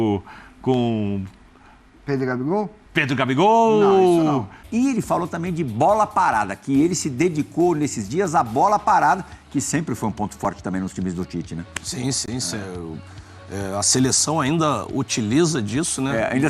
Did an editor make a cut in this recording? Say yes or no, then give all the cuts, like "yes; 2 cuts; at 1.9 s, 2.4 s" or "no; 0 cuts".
yes; 1 cut; at 4.6 s